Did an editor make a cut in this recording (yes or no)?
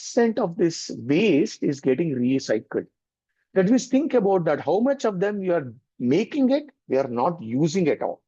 no